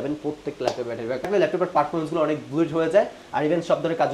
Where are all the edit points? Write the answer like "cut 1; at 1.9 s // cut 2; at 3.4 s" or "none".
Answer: cut 1; at 1.2 s